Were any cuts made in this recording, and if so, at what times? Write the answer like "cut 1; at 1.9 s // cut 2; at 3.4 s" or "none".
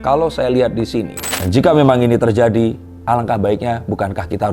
cut 1; at 1.3 s